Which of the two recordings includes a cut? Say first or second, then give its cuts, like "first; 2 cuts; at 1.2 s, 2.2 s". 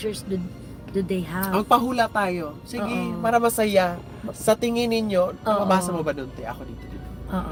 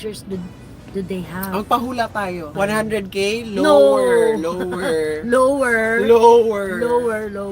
second; 1 cut; at 2.5 s